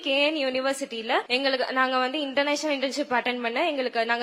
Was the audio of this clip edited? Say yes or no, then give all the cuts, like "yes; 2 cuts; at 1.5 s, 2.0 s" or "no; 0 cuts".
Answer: yes; 1 cut; at 1.3 s